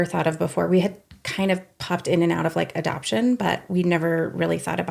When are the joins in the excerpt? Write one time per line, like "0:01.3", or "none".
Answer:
none